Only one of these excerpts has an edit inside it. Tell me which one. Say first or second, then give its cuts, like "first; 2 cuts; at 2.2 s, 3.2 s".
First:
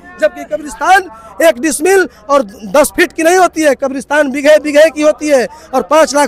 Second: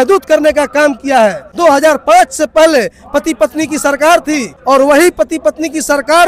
second; 2 cuts; at 1.5 s, 4.5 s